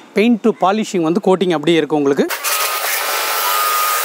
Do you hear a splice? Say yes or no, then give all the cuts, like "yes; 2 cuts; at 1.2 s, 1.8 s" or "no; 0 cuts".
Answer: no; 0 cuts